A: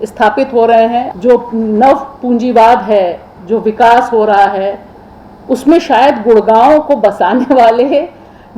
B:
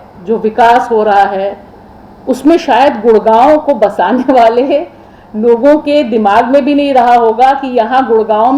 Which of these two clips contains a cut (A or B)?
A